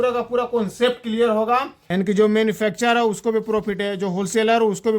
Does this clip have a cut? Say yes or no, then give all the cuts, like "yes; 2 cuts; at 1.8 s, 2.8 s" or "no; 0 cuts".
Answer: yes; 1 cut; at 1.8 s